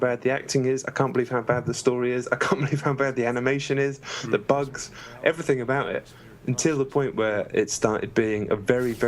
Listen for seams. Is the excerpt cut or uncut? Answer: cut